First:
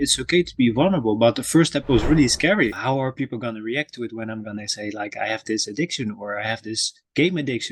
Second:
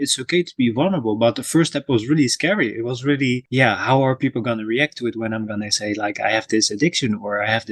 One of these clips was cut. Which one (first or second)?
first